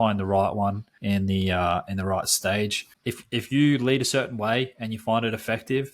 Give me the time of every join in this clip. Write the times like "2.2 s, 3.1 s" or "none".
0.9 s, 2.9 s